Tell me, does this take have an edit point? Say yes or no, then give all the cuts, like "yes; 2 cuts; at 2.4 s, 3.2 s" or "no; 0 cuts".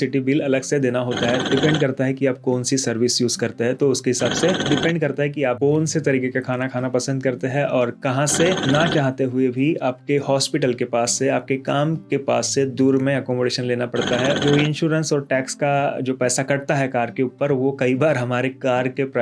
yes; 4 cuts; at 1.4 s, 4.6 s, 8.6 s, 14.4 s